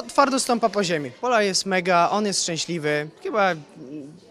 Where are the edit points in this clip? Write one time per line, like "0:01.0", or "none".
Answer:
0:01.2